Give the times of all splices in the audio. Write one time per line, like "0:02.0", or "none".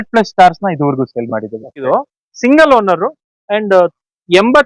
0:01.9

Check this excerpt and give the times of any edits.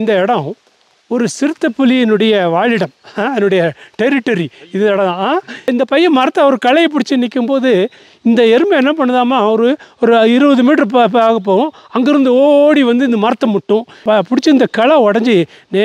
0:05.5
0:14.0

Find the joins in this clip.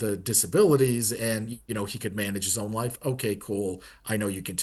none

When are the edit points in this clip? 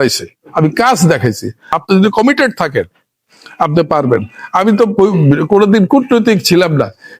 0:01.6

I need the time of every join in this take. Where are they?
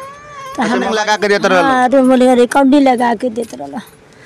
0:01.0

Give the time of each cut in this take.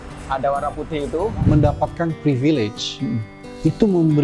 0:01.4

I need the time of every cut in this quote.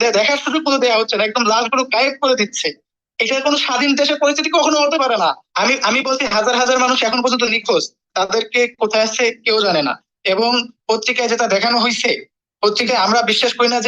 0:05.5

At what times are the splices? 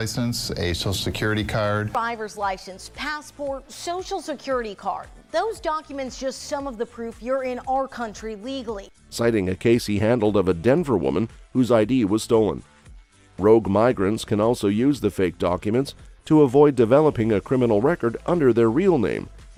none

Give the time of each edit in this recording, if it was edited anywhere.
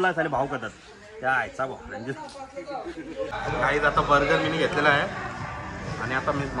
0:02.9

